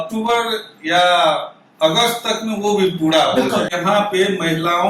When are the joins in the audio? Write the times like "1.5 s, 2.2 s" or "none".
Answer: 3.7 s